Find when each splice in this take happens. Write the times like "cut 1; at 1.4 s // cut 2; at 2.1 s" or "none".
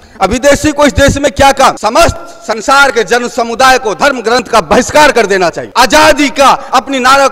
cut 1; at 1.8 s // cut 2; at 5.6 s